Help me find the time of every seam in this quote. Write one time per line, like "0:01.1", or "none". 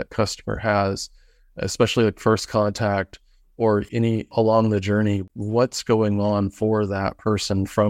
0:03.9
0:05.3